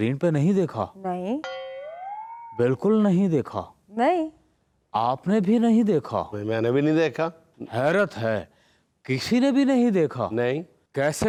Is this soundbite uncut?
yes; 0 cuts

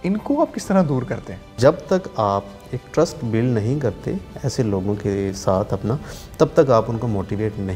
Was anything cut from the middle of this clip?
yes; 1 cut; at 1.5 s

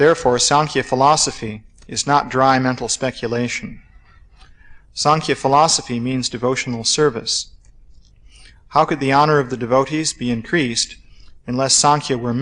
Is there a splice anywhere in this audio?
no; 0 cuts

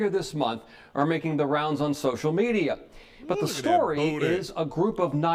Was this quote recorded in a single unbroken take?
yes; 0 cuts

